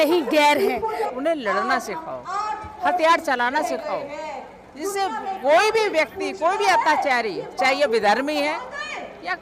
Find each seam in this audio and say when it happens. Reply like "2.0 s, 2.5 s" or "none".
1.0 s